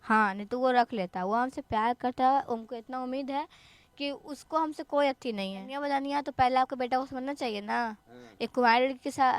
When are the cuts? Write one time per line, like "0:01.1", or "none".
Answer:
0:05.7

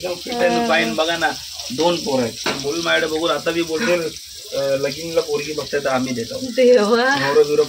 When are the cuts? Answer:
none

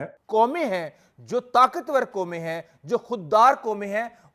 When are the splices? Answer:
none

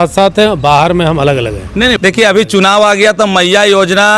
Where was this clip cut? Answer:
0:02.0

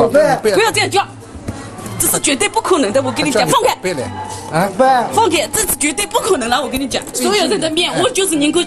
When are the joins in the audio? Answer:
none

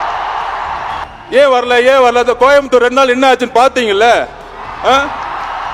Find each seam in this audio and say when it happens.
0:01.0

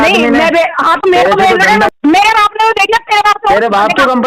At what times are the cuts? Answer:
0:01.9

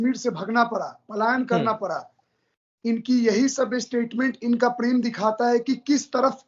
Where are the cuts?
none

